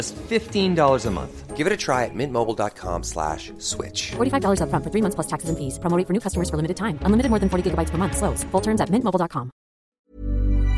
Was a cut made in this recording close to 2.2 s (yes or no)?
no